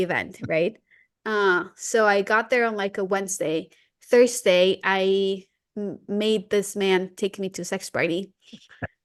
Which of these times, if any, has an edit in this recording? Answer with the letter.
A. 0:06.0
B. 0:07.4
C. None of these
C